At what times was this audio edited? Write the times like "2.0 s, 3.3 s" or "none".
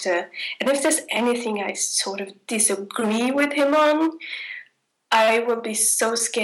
none